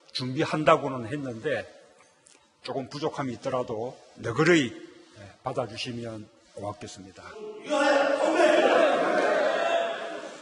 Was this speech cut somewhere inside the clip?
yes; 1 cut; at 3.6 s

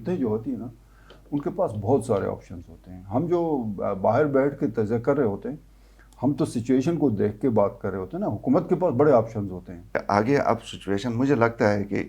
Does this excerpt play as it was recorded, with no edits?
no; 1 cut; at 10.0 s

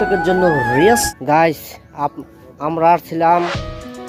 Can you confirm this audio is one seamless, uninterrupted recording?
no; 1 cut; at 1.0 s

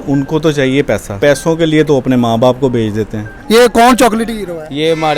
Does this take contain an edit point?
yes; 2 cuts; at 1.2 s, 3.3 s

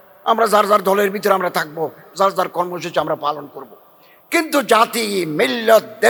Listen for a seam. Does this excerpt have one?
no; 0 cuts

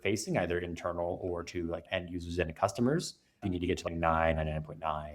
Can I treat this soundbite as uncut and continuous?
no; 1 cut; at 3.4 s

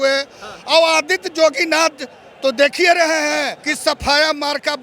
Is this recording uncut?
no; 1 cut; at 3.6 s

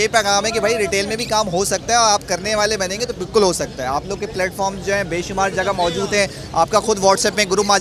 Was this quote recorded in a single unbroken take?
yes; 0 cuts

